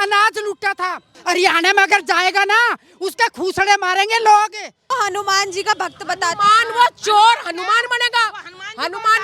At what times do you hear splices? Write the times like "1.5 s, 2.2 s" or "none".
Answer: 1.1 s, 4.7 s